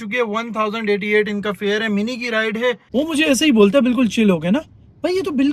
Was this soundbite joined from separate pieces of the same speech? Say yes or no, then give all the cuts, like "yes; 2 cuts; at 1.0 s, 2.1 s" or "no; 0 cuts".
yes; 1 cut; at 2.8 s